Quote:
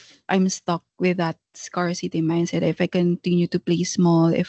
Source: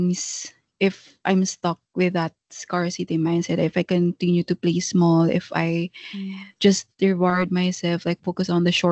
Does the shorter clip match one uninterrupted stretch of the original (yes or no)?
yes